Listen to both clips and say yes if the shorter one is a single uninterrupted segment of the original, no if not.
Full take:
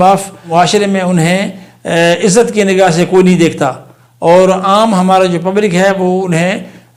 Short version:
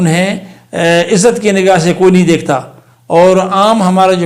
yes